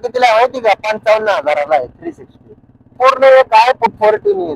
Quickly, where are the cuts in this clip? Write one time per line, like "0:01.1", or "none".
0:02.9
0:03.9

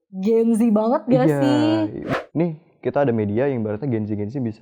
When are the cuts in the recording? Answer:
0:02.0

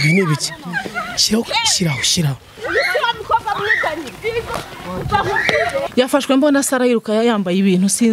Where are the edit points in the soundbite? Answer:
0:05.9

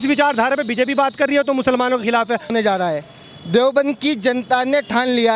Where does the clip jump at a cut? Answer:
0:02.5

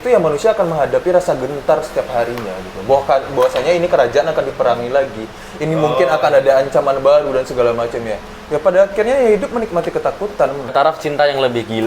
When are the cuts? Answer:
0:10.7

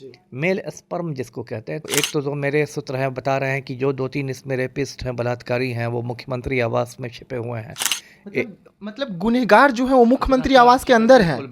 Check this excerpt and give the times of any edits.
0:01.8

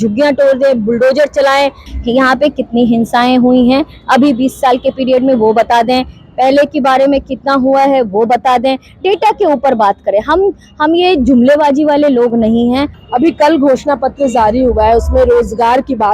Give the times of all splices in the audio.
0:01.9
0:13.0

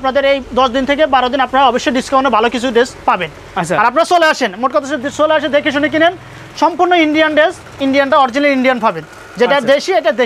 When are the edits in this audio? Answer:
none

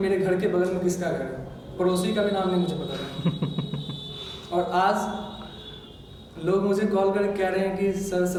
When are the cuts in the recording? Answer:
none

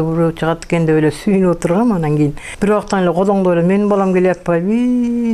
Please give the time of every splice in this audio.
0:02.5

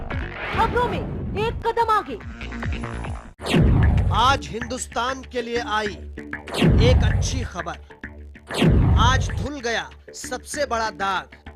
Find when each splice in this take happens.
0:03.3

